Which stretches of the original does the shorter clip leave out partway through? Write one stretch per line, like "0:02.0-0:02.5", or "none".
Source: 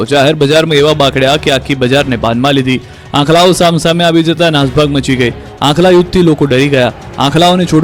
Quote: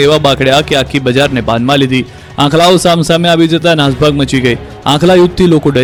none